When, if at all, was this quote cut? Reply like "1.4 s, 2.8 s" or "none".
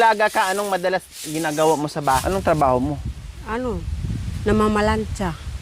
2.2 s